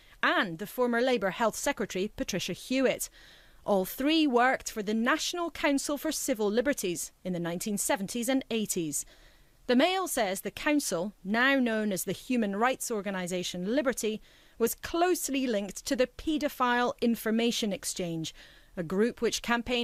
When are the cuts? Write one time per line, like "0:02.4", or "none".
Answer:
none